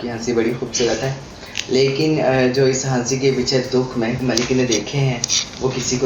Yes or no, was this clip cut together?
no